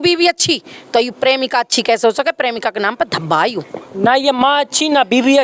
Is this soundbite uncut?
yes; 0 cuts

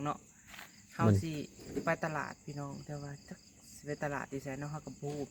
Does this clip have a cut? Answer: no; 0 cuts

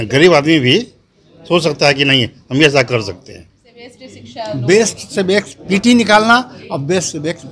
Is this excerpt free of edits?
yes; 0 cuts

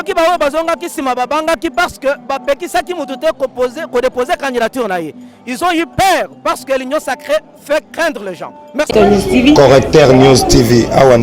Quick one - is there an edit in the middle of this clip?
yes; 1 cut; at 9.3 s

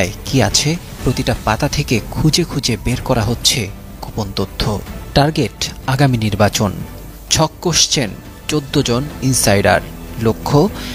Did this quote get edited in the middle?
no; 0 cuts

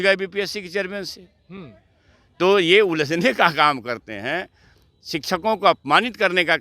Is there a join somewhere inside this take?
no; 0 cuts

